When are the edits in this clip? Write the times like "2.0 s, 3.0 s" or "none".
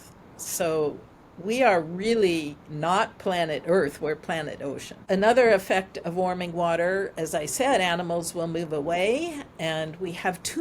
4.9 s